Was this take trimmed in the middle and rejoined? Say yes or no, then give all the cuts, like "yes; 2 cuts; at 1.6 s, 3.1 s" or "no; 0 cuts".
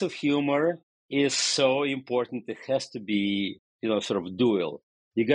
yes; 2 cuts; at 0.9 s, 3.6 s